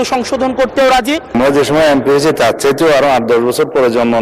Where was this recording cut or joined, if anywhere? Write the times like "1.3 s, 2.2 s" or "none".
1.3 s